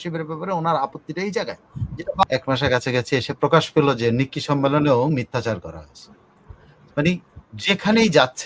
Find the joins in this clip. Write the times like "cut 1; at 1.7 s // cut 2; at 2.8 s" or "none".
cut 1; at 2.2 s